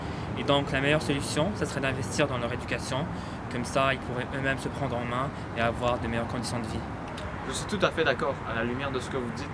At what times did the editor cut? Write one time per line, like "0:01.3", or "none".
0:07.1